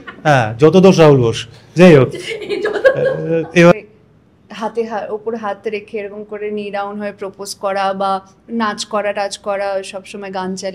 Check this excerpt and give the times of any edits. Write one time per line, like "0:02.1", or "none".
0:03.7